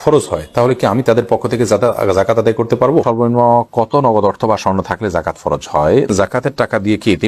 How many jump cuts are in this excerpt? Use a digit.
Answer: 2